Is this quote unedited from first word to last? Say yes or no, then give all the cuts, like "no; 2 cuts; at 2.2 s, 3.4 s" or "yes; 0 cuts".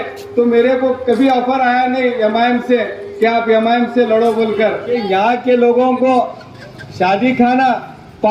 no; 1 cut; at 4.9 s